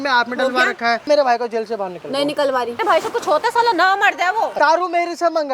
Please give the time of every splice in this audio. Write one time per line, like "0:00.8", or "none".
0:01.1
0:02.8
0:04.5